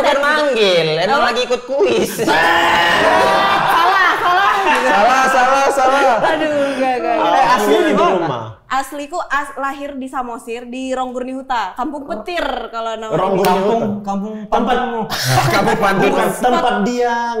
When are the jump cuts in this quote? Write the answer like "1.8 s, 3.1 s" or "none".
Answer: none